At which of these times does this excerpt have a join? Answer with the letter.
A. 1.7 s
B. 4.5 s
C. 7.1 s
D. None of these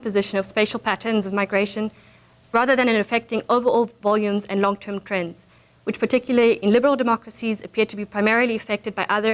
A